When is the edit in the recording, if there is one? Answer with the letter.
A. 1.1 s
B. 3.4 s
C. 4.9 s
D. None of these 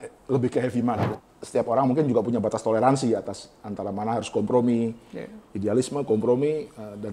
A